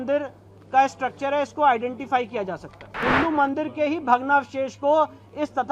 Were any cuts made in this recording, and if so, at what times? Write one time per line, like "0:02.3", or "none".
0:02.8